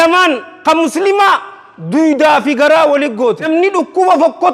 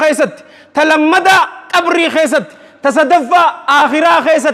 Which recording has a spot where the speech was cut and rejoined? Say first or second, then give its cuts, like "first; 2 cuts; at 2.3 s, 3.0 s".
first; 1 cut; at 3.5 s